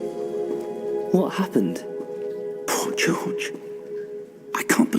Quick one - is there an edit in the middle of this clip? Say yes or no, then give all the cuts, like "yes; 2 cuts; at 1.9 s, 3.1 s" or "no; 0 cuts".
yes; 1 cut; at 1.1 s